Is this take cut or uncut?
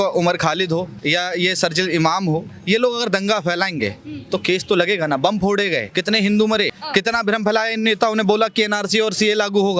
cut